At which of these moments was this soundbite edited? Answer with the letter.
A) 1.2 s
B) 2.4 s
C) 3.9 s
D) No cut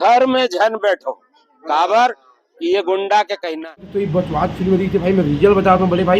C